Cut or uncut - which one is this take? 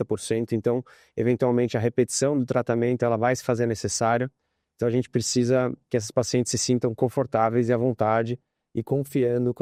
uncut